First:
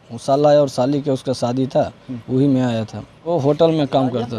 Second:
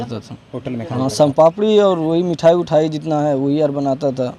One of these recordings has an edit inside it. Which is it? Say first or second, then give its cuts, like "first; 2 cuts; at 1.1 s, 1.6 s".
first; 1 cut; at 3.3 s